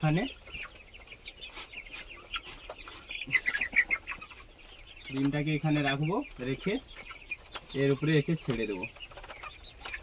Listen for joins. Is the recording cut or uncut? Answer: uncut